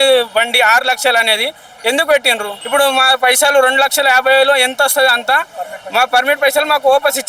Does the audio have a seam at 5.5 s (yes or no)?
no